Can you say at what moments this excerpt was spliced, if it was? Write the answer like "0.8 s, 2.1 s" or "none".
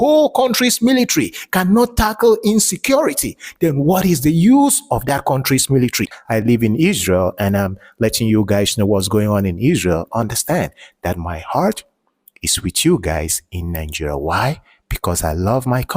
6.1 s